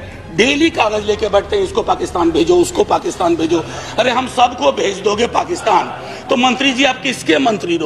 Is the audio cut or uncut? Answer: uncut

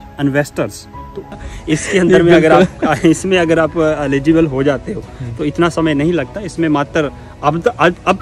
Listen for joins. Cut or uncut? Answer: cut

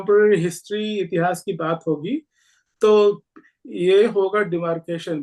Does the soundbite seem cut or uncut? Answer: uncut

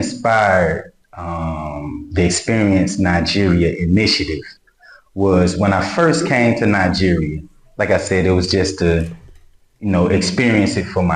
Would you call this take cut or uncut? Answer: uncut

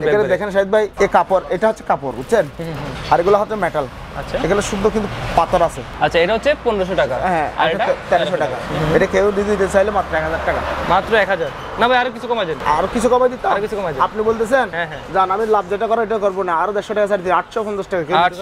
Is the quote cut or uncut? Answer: cut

